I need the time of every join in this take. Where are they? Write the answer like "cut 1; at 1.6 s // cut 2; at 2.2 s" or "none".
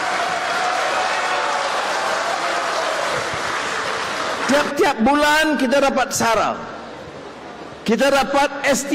cut 1; at 4.4 s